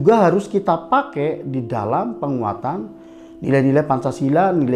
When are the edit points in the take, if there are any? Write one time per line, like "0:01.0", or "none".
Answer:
none